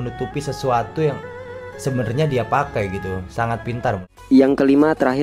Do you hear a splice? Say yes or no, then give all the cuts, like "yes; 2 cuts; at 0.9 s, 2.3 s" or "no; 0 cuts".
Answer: yes; 1 cut; at 4.1 s